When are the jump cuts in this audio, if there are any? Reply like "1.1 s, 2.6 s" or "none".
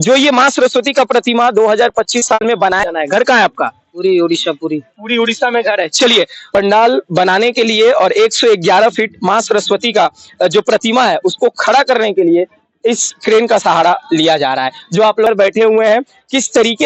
2.8 s, 6.4 s, 15.3 s